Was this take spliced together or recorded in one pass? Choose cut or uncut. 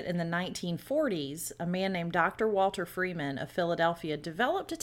uncut